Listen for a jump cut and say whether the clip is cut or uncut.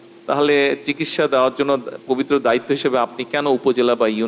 uncut